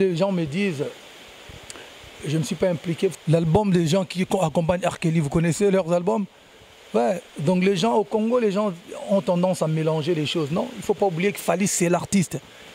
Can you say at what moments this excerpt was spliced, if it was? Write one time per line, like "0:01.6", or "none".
0:03.1